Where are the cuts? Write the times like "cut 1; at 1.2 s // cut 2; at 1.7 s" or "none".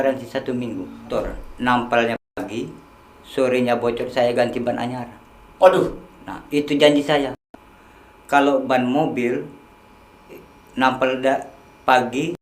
cut 1; at 1.1 s